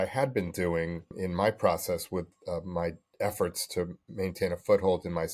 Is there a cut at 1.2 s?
yes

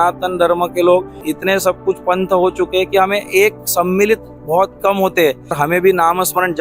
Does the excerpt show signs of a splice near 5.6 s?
yes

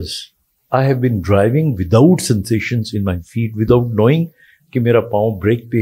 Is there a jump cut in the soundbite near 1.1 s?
no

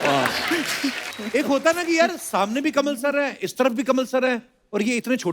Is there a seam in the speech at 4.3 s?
no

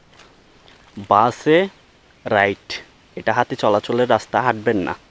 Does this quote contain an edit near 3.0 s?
no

